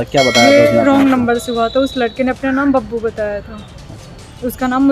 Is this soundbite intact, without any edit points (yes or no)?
no